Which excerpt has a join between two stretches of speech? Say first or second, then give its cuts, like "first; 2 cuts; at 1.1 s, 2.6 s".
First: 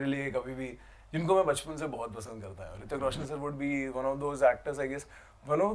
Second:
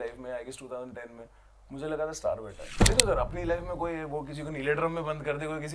second; 1 cut; at 2.7 s